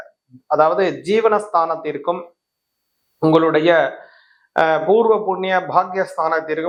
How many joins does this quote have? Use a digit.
0